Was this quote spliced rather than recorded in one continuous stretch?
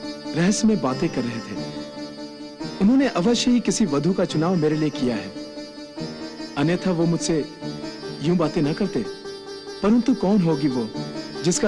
no; 0 cuts

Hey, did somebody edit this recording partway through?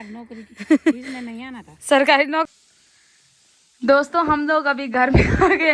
yes; 1 cut; at 2.5 s

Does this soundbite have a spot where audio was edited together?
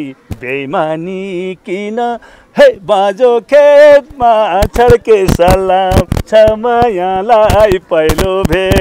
no; 0 cuts

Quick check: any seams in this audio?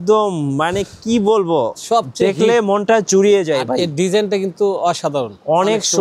no; 0 cuts

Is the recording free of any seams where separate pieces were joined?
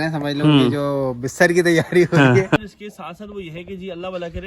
no; 1 cut; at 2.6 s

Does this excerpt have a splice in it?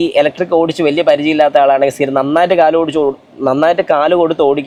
no; 0 cuts

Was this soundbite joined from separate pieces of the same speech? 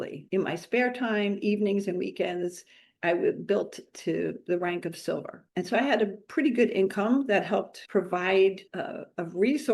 yes; 1 cut; at 8.6 s

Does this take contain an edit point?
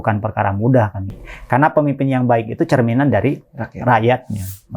yes; 1 cut; at 1.2 s

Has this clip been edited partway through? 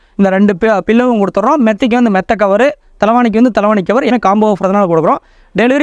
yes; 1 cut; at 4.1 s

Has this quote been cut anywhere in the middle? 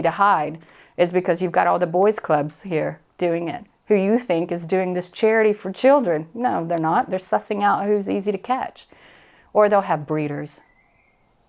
no; 0 cuts

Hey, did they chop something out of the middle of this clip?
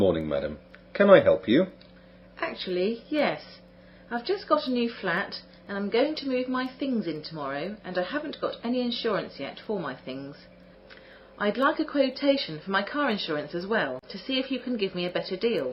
no; 0 cuts

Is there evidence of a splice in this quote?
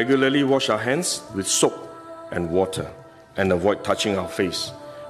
no; 0 cuts

